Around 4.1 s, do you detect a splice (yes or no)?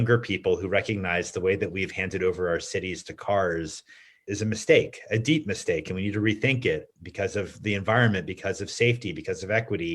yes